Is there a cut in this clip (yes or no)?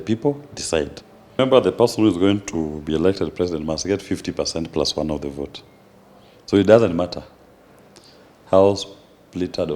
yes